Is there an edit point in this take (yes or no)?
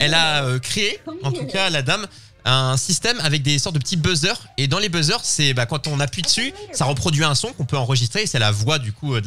no